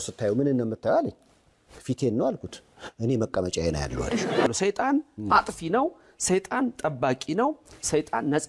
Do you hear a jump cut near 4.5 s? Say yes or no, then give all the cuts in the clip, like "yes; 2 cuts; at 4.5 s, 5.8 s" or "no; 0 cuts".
yes; 1 cut; at 4.5 s